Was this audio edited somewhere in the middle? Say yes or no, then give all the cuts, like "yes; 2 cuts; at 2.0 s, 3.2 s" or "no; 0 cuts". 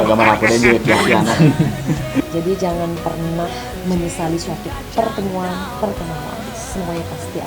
yes; 1 cut; at 2.2 s